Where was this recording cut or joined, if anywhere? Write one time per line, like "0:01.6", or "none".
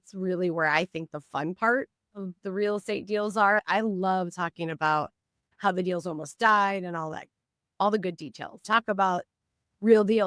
0:03.6
0:08.6